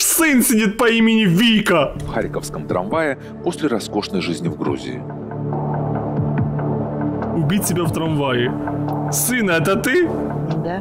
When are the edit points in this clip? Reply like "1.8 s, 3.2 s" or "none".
none